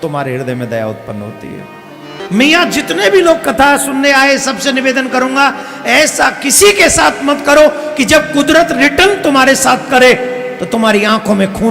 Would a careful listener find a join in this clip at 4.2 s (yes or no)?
no